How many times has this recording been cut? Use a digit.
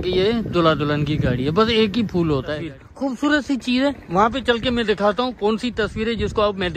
1